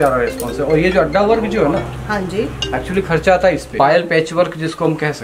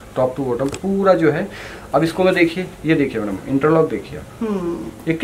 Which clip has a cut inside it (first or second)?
first